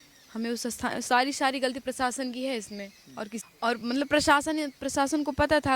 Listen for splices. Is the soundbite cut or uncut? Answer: cut